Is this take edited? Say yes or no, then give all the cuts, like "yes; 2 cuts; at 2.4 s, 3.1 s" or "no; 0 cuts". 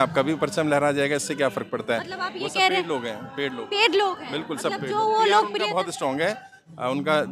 no; 0 cuts